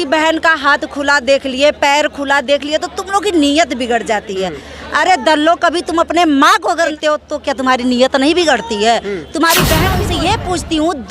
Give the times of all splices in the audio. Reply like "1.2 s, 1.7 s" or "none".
6.9 s, 10.0 s